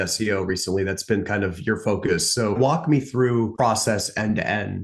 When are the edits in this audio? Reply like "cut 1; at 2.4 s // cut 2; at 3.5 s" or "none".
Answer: cut 1; at 2.6 s // cut 2; at 3.5 s

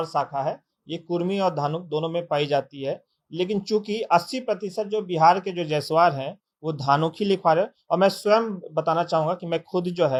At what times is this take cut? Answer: none

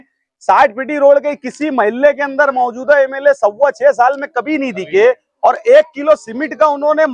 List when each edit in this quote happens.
none

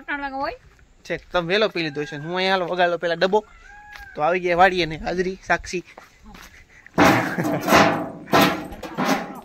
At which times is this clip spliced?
none

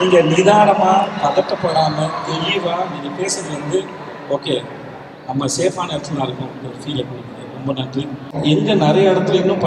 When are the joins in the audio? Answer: cut 1; at 8.3 s

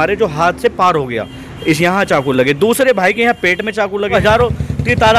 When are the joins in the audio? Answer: cut 1; at 4.1 s

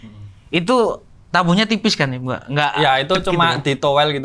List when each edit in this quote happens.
none

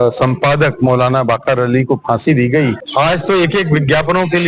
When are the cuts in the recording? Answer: cut 1; at 2.8 s

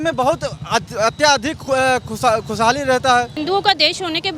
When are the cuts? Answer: cut 1; at 3.3 s

